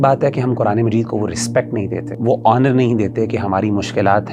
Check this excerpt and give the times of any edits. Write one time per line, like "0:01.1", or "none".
0:02.1